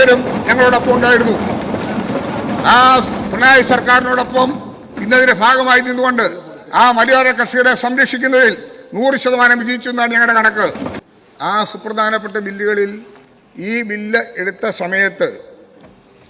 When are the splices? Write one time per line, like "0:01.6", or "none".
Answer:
0:11.0

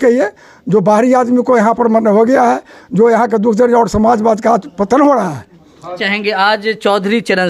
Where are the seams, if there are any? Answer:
0:06.0

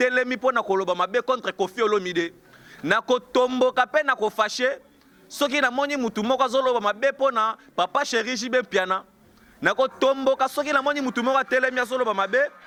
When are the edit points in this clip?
none

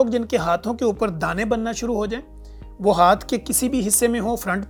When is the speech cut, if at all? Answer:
none

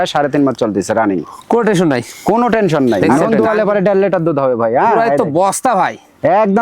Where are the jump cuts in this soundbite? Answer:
0:03.2

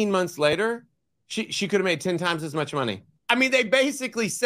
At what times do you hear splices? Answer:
0:03.1

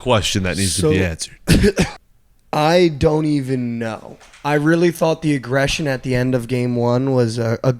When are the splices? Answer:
0:01.9

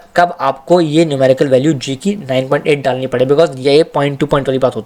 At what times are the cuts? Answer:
none

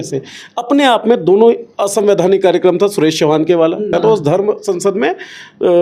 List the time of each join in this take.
0:03.9

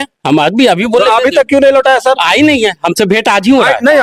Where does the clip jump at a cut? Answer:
none

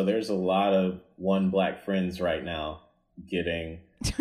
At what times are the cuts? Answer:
0:01.1

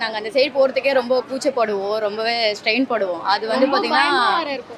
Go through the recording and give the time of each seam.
none

